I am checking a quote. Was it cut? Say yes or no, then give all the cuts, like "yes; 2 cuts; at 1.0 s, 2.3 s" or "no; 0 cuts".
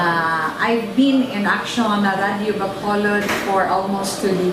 no; 0 cuts